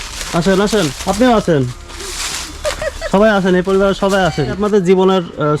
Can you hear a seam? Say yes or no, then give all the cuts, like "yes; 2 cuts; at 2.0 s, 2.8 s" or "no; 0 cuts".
yes; 2 cuts; at 1.0 s, 4.6 s